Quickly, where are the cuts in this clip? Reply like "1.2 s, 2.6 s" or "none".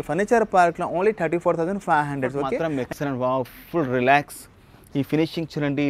2.6 s